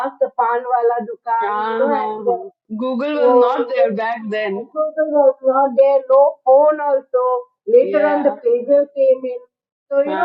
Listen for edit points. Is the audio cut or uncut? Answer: uncut